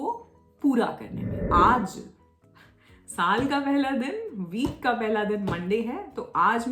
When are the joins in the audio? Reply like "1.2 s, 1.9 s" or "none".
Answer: 1.4 s